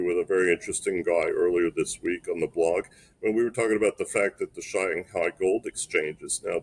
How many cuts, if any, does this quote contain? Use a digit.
0